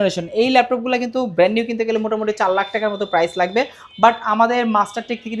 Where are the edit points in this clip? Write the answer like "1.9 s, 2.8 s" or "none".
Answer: none